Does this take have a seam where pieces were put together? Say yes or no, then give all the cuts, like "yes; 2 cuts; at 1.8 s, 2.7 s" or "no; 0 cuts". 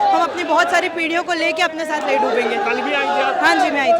no; 0 cuts